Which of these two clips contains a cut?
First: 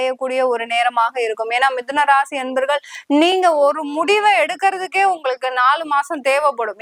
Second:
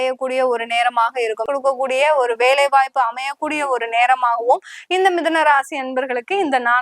second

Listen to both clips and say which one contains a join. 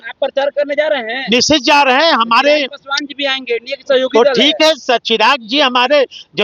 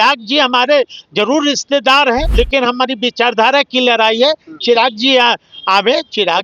second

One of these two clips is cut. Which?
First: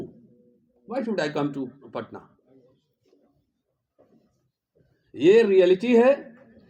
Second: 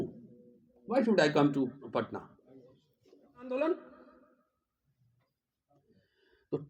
second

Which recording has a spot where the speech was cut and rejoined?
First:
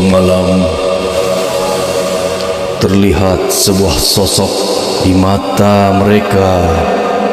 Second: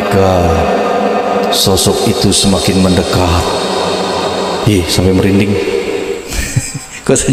first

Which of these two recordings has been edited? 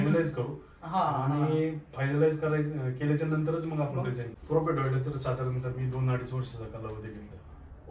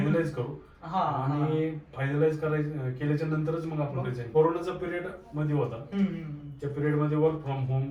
first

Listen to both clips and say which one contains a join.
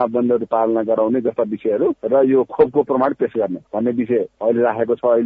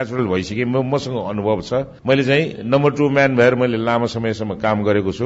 first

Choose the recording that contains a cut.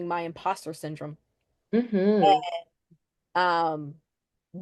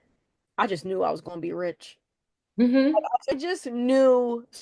second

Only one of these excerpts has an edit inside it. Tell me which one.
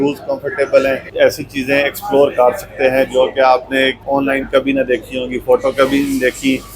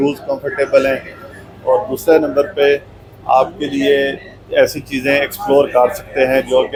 first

